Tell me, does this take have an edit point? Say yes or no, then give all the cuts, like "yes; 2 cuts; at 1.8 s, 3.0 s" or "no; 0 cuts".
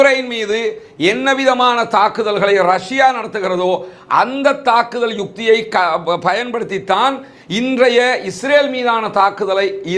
no; 0 cuts